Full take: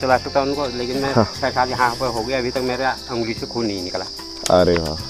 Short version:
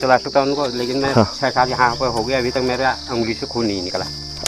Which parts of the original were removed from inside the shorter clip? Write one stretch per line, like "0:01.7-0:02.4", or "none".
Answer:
none